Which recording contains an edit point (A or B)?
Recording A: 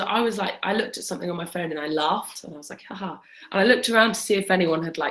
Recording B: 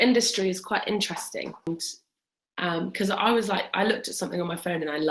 B